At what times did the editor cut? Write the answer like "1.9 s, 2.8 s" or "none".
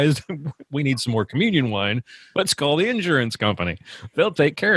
2.2 s